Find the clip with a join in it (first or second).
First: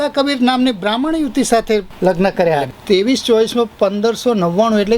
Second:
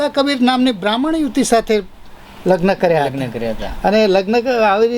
first